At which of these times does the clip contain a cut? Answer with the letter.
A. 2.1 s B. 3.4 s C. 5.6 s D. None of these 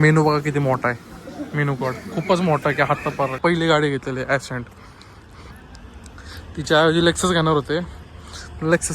B